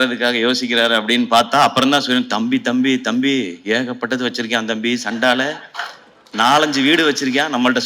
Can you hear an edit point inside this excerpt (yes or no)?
no